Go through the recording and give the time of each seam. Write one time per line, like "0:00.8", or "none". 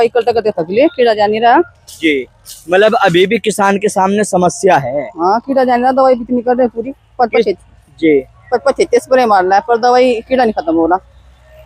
none